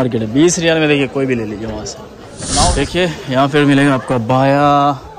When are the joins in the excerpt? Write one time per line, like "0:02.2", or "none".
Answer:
0:02.6